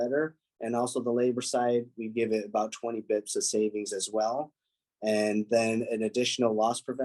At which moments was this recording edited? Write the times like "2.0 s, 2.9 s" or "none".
none